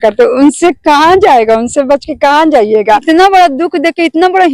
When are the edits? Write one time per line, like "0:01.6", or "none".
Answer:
0:03.0